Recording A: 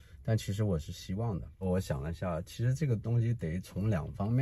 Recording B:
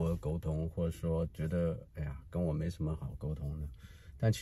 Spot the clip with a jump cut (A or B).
A